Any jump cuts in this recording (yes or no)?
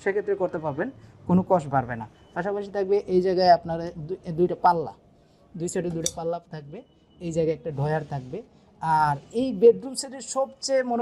no